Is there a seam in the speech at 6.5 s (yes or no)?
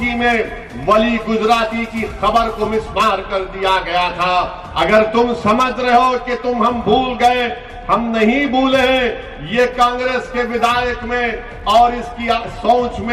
no